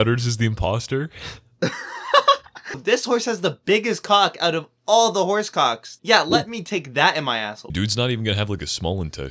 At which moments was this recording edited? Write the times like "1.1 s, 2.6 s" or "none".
2.8 s, 5.9 s, 7.7 s